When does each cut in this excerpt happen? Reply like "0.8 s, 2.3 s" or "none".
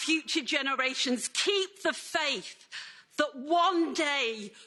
none